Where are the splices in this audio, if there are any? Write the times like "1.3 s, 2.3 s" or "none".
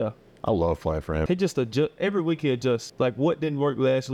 1.2 s, 2.9 s